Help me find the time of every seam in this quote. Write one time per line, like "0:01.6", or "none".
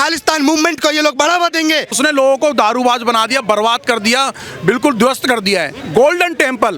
0:02.0
0:05.8